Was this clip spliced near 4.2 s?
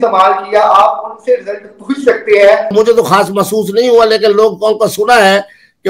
no; 1 cut; at 2.7 s

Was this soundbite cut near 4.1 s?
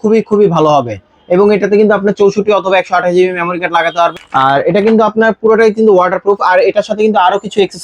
yes; 1 cut; at 4.1 s

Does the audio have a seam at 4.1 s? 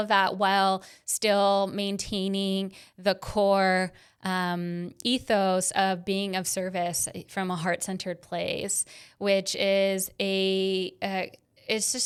no; 0 cuts

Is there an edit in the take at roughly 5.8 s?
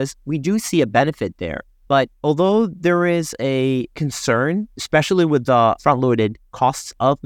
yes; 2 cuts; at 4.8 s, 5.8 s

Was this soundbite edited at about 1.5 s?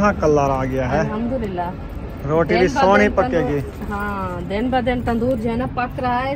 no; 0 cuts

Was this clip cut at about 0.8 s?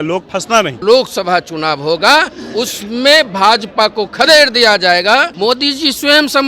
yes; 2 cuts; at 0.8 s, 5.3 s

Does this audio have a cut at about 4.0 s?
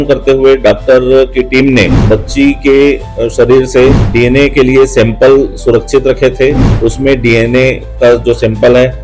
yes; 3 cuts; at 2.0 s, 4.0 s, 6.7 s

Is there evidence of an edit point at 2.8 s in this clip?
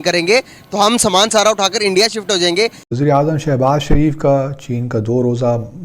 yes; 1 cut; at 2.8 s

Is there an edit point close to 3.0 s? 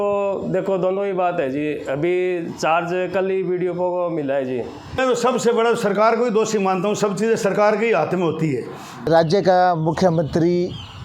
no; 2 cuts; at 5.0 s, 8.9 s

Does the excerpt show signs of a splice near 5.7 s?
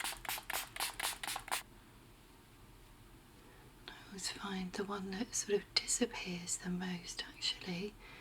no; 1 cut; at 1.6 s

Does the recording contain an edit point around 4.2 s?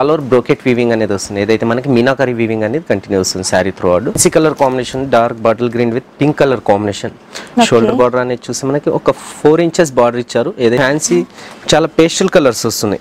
yes; 2 cuts; at 4.2 s, 10.8 s

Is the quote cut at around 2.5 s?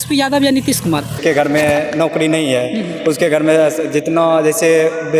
no; 1 cut; at 1.2 s

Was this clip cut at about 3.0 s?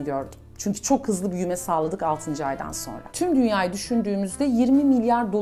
yes; 1 cut; at 3.0 s

